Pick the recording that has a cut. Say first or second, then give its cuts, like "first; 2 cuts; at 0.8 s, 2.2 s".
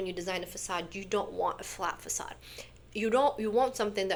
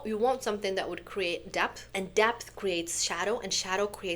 second; 1 cut; at 1.8 s